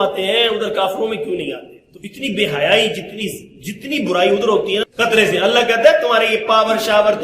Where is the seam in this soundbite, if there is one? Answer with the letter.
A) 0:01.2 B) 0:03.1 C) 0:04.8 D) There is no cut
C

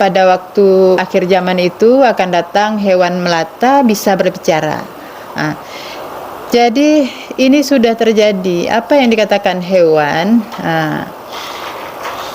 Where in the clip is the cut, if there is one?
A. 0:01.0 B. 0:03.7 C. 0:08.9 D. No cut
A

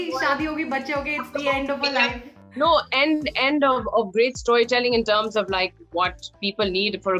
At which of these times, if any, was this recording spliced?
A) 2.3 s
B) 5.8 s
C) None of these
A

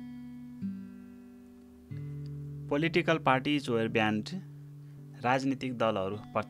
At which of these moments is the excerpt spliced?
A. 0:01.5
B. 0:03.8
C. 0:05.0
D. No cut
A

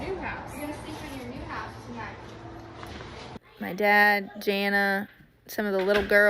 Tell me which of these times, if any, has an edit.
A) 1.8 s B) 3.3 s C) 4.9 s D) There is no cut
B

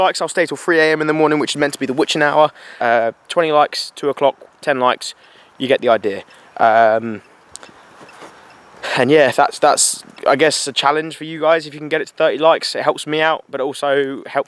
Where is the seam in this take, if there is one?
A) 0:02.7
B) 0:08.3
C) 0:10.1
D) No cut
A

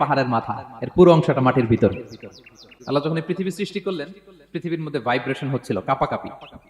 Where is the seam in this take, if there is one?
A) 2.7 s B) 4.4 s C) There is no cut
A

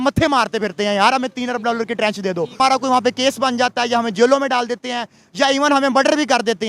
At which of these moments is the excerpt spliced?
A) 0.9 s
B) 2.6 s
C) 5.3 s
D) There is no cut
B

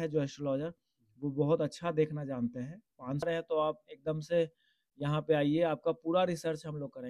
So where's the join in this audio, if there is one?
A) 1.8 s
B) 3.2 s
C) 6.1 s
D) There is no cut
B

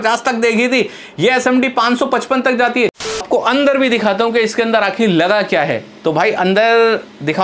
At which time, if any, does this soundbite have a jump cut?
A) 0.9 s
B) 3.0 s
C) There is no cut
B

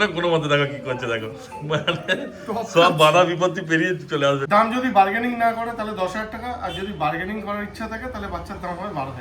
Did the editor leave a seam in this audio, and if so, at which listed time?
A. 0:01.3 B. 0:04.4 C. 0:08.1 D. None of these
B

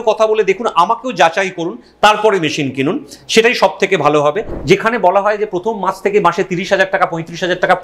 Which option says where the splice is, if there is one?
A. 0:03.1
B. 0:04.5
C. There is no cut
B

